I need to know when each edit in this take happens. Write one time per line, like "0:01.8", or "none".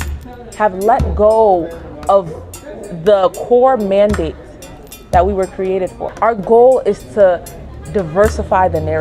0:06.0